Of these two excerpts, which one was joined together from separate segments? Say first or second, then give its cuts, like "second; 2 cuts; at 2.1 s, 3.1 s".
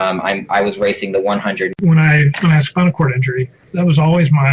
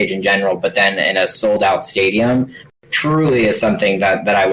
first; 2 cuts; at 1.8 s, 3.6 s